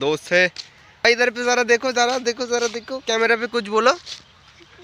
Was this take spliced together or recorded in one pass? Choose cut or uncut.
cut